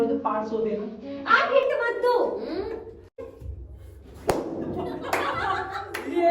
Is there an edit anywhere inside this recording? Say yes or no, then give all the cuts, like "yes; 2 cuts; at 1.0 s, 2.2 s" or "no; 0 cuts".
yes; 1 cut; at 3.3 s